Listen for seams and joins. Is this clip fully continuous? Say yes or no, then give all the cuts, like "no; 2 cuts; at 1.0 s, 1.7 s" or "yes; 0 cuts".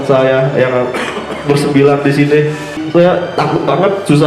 no; 1 cut; at 2.8 s